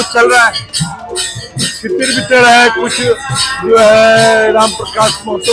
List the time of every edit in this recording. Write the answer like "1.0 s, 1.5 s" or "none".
none